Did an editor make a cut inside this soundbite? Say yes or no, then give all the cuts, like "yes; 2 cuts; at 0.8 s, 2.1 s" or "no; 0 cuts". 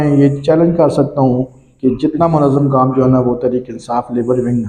no; 0 cuts